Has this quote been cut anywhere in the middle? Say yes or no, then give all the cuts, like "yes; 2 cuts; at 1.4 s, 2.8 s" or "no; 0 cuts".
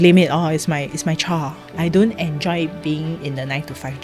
yes; 1 cut; at 1.6 s